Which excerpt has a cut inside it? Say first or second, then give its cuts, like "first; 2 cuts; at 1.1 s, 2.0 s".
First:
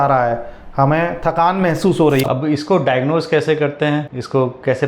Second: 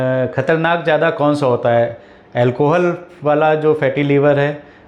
first; 1 cut; at 2.2 s